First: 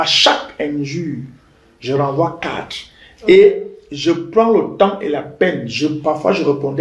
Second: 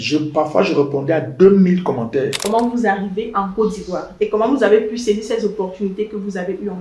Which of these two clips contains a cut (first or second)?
second